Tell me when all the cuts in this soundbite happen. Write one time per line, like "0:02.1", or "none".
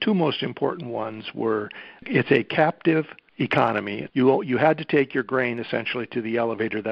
0:02.0
0:03.6